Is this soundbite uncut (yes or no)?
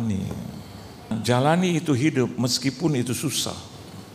no